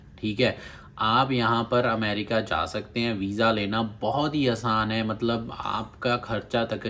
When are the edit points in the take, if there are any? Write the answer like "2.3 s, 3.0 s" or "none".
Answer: none